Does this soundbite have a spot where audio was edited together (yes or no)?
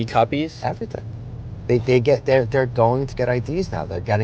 no